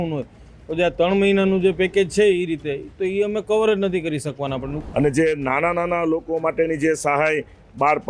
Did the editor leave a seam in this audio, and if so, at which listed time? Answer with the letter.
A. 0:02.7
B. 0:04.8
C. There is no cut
B